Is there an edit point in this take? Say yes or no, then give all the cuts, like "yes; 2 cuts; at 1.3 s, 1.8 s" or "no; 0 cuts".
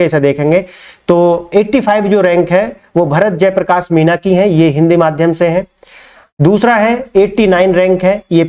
no; 0 cuts